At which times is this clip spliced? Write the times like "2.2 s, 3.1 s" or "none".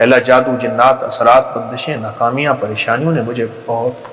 none